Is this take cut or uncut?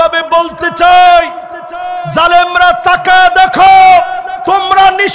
uncut